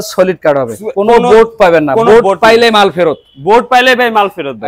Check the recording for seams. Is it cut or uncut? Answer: uncut